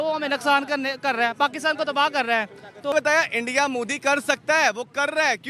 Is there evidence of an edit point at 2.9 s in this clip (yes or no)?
yes